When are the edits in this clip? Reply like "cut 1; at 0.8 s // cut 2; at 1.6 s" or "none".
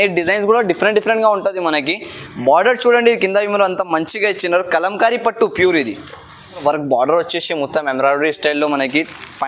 cut 1; at 6.6 s